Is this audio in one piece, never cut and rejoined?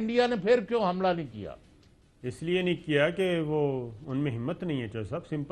yes; 0 cuts

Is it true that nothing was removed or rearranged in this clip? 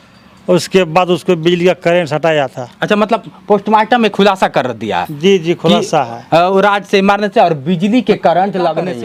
yes; 0 cuts

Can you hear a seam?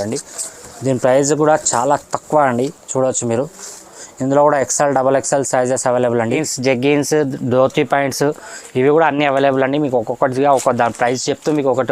yes; 1 cut; at 6.5 s

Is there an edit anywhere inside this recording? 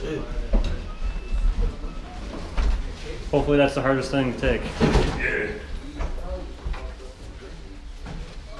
no; 0 cuts

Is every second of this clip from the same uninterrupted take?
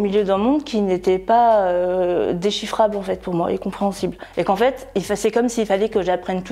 yes; 0 cuts

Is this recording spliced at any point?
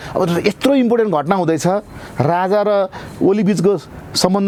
no; 0 cuts

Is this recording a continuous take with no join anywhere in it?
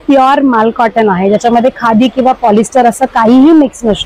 yes; 0 cuts

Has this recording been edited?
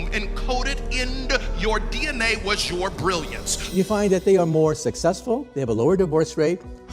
yes; 1 cut; at 3.7 s

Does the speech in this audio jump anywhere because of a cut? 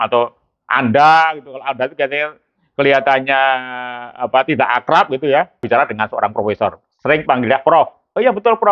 yes; 1 cut; at 5.6 s

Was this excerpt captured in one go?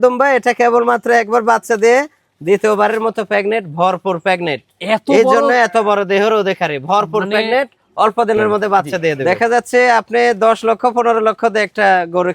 no; 1 cut; at 9.2 s

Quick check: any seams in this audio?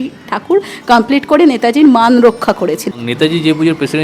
yes; 1 cut; at 3.0 s

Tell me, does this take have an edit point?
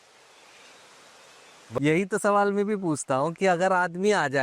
yes; 1 cut; at 1.8 s

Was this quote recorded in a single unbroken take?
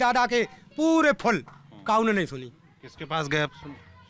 yes; 0 cuts

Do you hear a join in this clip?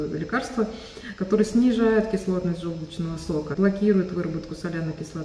yes; 1 cut; at 3.5 s

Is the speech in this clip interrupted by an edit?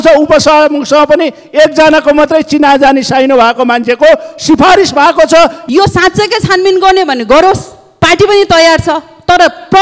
yes; 1 cut; at 5.6 s

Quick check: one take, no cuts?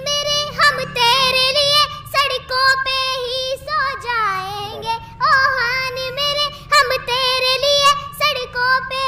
yes; 0 cuts

